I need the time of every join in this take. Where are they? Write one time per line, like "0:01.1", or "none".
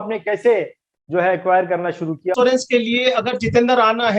0:02.3